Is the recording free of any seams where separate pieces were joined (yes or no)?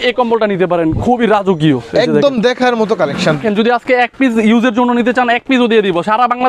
no